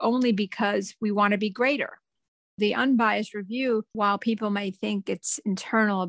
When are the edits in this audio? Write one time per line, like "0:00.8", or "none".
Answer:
0:02.2
0:03.9